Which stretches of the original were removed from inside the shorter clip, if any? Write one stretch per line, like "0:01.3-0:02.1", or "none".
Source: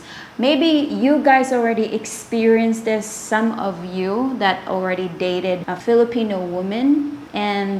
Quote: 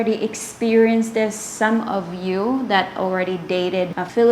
none